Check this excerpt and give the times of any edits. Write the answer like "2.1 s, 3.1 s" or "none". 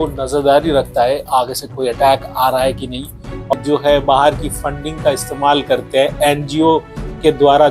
3.5 s